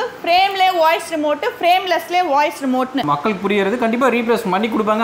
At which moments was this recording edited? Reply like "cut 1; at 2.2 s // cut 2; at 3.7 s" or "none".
cut 1; at 3.0 s

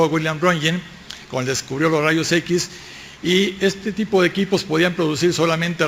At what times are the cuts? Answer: none

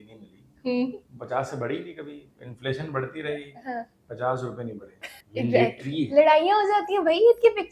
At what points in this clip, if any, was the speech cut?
cut 1; at 5.2 s

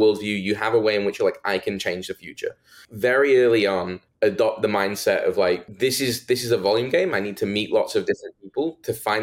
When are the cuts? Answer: cut 1; at 2.8 s // cut 2; at 4.0 s // cut 3; at 5.7 s

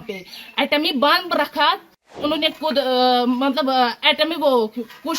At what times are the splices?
cut 1; at 2.1 s

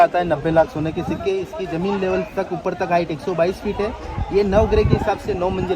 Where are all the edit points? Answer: none

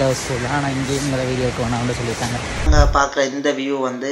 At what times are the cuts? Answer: cut 1; at 2.5 s

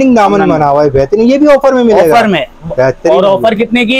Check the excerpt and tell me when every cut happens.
none

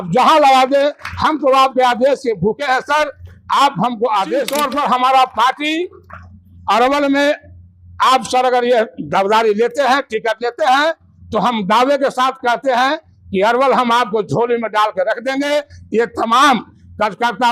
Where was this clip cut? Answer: cut 1; at 4.5 s

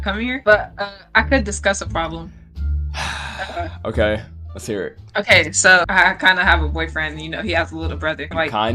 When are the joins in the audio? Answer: none

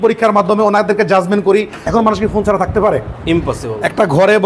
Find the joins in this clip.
cut 1; at 1.8 s

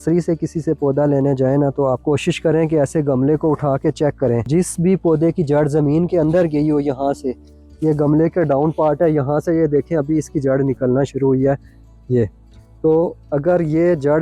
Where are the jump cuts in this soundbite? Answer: cut 1; at 2.0 s // cut 2; at 4.4 s

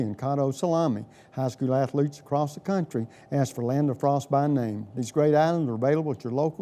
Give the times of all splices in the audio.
none

